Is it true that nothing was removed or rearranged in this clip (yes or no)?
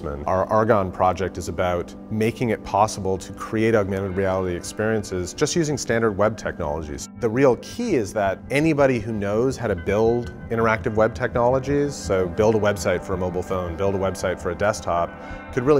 yes